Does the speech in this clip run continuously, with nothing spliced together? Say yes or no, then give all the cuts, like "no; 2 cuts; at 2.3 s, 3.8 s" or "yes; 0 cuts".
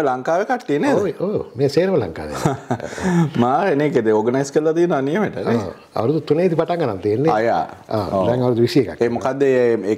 yes; 0 cuts